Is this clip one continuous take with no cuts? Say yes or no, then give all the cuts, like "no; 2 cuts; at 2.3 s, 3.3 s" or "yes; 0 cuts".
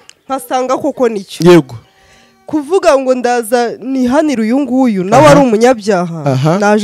yes; 0 cuts